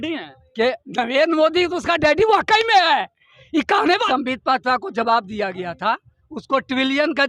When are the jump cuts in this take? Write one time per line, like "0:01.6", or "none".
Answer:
0:04.0

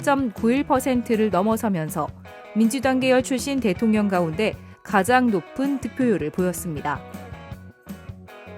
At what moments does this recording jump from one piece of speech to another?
0:07.0

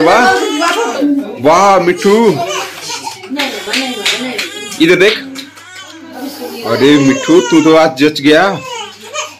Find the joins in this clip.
0:01.0

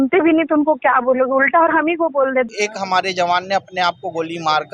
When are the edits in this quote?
0:02.5

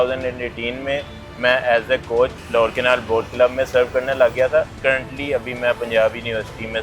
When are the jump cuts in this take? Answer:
0:02.4
0:04.7

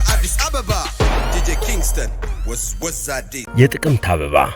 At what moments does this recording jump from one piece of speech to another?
0:03.3

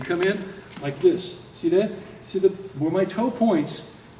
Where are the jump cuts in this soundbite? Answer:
none

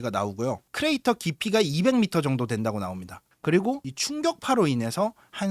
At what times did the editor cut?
0:03.2

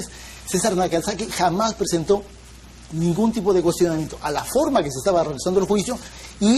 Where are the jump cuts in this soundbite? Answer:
0:02.5

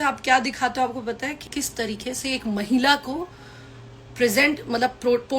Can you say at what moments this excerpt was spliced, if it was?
0:01.4

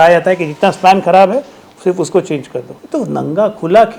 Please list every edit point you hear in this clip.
0:02.8

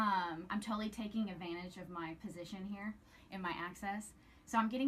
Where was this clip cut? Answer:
none

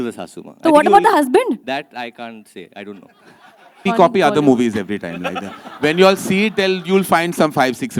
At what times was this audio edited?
0:03.8

